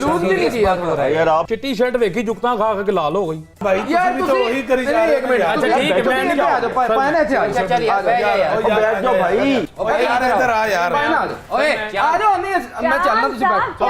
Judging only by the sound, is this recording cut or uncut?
cut